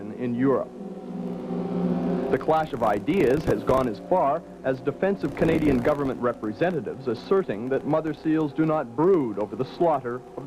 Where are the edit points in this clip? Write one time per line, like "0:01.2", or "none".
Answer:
0:07.4